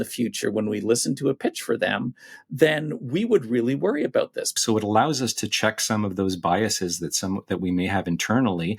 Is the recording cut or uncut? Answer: cut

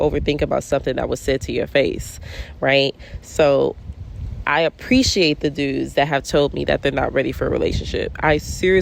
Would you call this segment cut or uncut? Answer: uncut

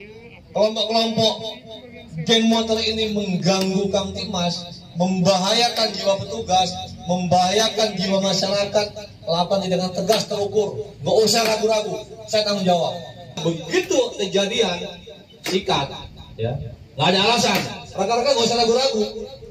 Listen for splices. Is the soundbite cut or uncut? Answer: cut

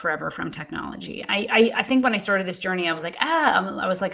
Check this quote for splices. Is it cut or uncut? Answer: uncut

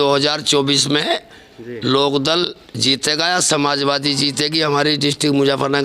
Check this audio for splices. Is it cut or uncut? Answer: uncut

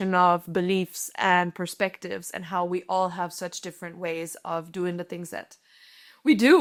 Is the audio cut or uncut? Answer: uncut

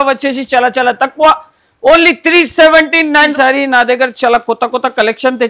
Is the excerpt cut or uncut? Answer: cut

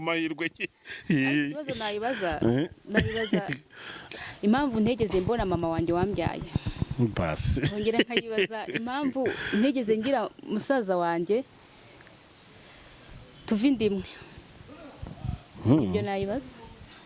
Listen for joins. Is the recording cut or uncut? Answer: uncut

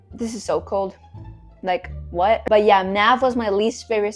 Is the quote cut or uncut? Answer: cut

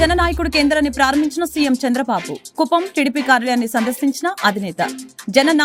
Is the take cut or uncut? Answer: uncut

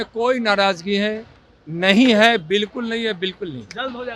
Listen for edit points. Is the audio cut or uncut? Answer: uncut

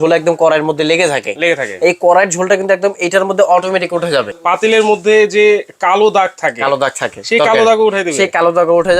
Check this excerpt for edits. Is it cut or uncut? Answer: cut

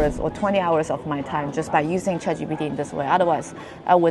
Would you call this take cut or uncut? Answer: uncut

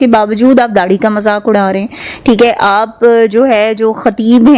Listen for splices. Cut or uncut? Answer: uncut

